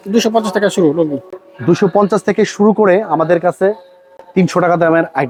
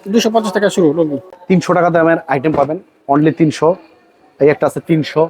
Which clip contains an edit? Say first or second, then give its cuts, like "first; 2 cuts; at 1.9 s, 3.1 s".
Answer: second; 1 cut; at 1.3 s